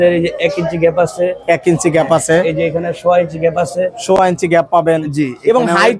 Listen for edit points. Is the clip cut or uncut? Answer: uncut